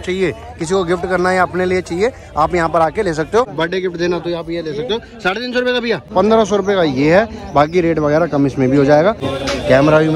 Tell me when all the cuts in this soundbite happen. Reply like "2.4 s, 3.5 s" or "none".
3.5 s, 6.0 s, 9.3 s